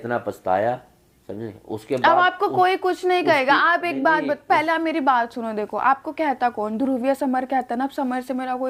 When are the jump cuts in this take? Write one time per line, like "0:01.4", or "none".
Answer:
none